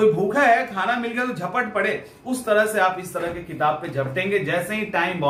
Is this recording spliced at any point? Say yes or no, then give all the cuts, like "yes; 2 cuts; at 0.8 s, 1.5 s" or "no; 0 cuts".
no; 0 cuts